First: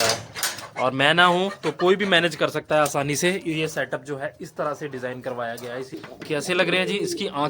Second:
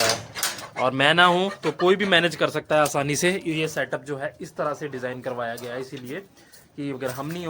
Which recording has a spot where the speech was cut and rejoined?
first; 1 cut; at 6.0 s

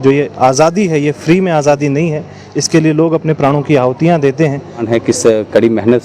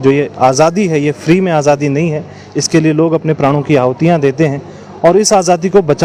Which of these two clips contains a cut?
first; 1 cut; at 4.8 s

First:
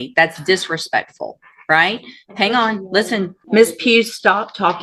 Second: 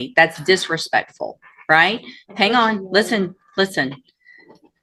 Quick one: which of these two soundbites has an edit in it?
first; 1 cut; at 3.4 s

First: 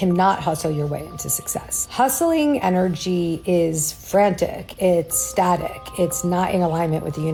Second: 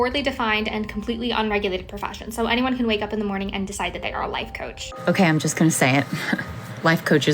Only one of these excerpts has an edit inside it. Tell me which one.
second; 1 cut; at 4.9 s

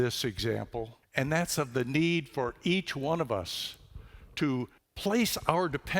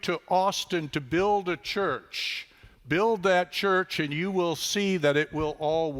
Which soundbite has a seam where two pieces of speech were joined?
first; 2 cuts; at 1.0 s, 4.8 s

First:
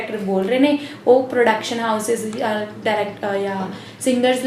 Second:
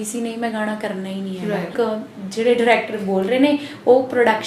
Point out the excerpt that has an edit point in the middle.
second; 1 cut; at 1.7 s

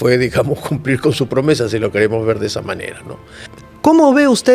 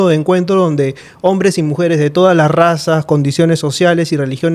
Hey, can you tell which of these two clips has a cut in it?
first; 1 cut; at 3.5 s

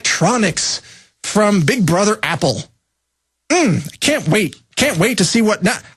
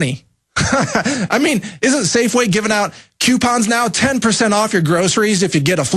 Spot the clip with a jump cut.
second; 1 cut; at 4.2 s

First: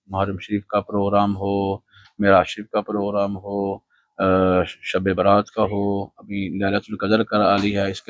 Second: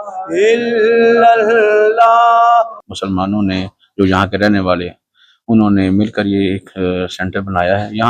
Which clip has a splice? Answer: second; 1 cut; at 2.8 s

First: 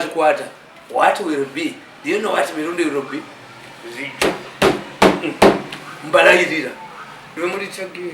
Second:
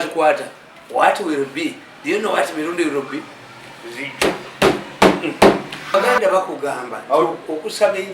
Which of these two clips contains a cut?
second; 1 cut; at 5.9 s

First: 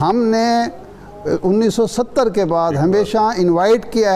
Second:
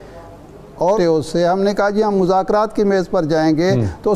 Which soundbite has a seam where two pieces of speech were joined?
second; 1 cut; at 1.0 s

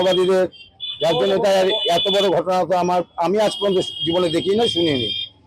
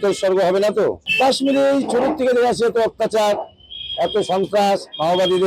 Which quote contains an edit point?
second; 1 cut; at 1.1 s

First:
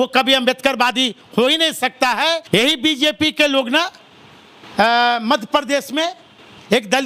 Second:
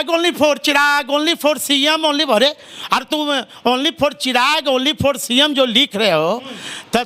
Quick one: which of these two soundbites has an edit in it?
first; 1 cut; at 2.4 s

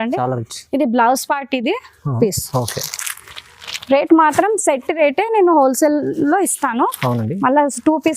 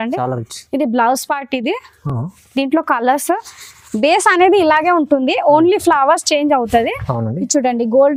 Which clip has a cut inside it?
first; 1 cut; at 2.2 s

